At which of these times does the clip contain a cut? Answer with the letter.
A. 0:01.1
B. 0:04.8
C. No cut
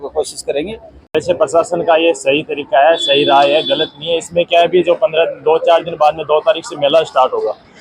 A